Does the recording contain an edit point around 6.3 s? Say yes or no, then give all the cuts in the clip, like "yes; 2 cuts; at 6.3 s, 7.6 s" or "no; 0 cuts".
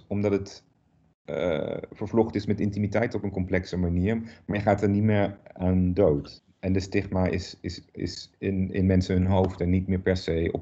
yes; 1 cut; at 6.3 s